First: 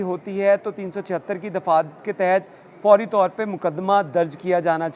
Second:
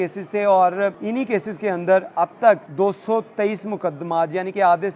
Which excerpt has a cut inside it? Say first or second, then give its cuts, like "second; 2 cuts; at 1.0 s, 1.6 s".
second; 2 cuts; at 1.0 s, 2.7 s